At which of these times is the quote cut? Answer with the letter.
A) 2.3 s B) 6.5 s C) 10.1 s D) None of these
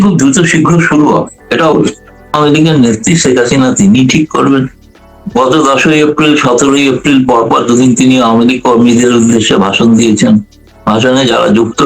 A